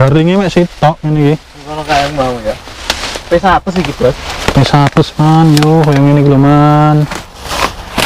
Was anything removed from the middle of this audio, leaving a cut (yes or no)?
no